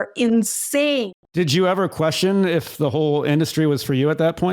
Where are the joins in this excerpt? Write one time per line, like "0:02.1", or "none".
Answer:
0:01.3